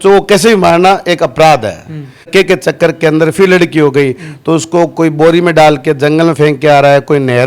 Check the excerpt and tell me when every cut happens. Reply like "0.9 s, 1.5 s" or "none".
2.3 s